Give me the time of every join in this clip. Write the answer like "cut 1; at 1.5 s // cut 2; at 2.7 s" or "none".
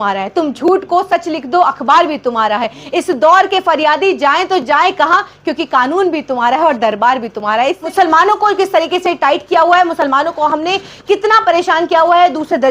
cut 1; at 7.9 s